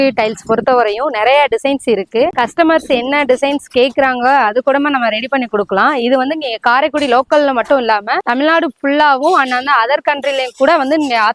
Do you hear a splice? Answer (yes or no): no